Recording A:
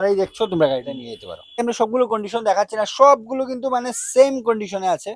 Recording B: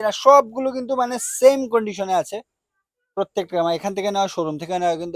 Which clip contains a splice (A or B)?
A